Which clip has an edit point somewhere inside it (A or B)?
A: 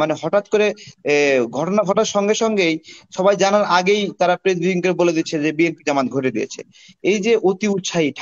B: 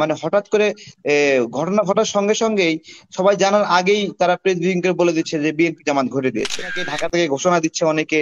B